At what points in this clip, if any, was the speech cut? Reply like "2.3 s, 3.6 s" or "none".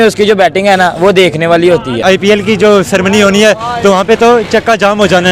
2.0 s